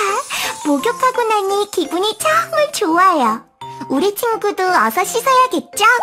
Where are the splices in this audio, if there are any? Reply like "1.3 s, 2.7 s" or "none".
none